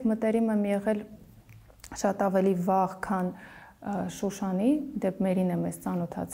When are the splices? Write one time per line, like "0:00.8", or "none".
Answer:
none